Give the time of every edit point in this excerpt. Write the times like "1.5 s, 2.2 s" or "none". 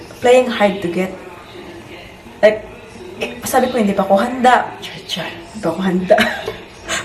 none